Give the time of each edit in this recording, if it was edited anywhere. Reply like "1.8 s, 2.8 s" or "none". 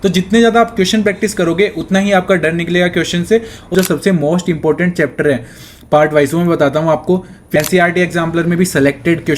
3.7 s, 7.4 s